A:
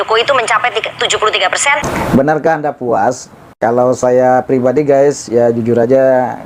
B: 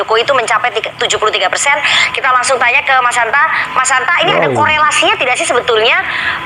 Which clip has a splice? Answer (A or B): A